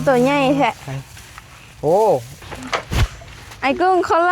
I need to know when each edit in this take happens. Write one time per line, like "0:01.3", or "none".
0:02.4